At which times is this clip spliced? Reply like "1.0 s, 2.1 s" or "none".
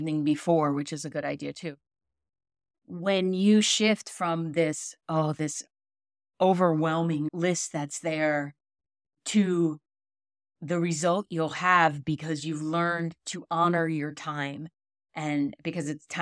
7.3 s